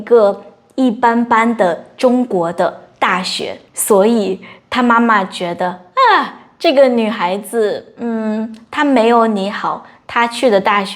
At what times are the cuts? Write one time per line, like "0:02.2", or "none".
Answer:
0:03.7

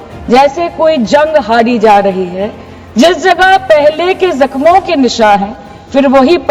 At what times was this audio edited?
none

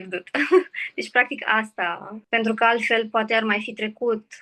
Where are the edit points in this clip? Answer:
0:02.1

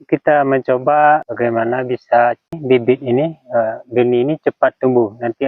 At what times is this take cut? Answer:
0:01.3
0:02.6

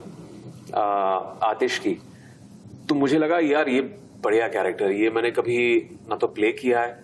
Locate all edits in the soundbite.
none

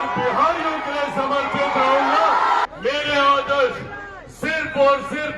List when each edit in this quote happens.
0:02.6

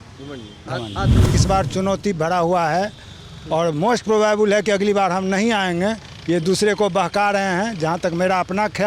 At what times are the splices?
0:01.3

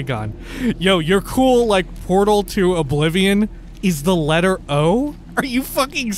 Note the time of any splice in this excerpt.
0:03.6
0:05.2

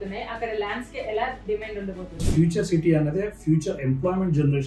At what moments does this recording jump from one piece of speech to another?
0:02.2

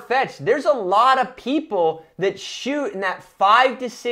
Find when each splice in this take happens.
none

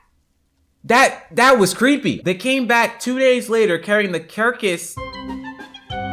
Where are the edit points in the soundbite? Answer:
0:02.2
0:04.9

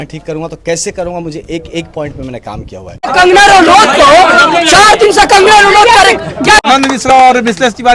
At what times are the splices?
0:03.1
0:06.7

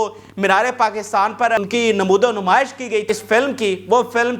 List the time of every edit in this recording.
0:01.6
0:03.1

